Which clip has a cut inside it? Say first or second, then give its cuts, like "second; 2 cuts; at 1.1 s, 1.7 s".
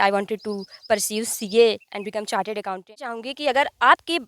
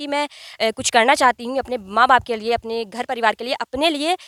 first; 1 cut; at 3.1 s